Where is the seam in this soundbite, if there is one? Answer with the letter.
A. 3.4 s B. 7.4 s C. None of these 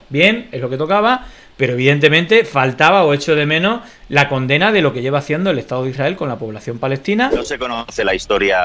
B